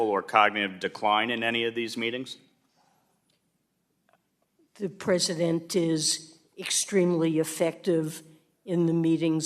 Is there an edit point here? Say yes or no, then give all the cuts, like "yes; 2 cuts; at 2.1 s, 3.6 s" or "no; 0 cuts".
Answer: no; 0 cuts